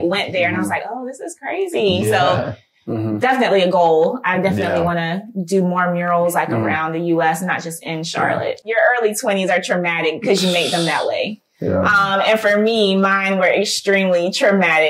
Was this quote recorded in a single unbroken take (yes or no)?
no